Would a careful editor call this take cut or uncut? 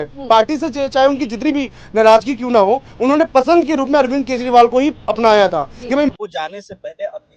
cut